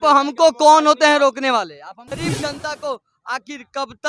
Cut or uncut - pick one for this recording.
cut